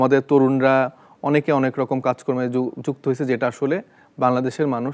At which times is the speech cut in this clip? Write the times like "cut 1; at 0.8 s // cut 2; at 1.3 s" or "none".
none